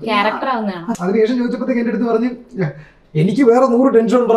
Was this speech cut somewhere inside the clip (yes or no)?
yes